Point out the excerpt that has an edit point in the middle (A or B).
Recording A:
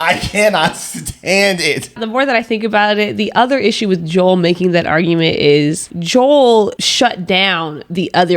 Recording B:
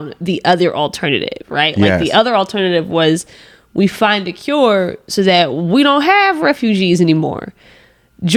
A